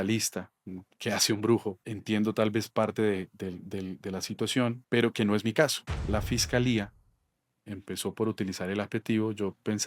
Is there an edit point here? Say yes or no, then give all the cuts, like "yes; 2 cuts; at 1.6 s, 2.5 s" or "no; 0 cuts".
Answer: yes; 3 cuts; at 1.9 s, 4.8 s, 5.9 s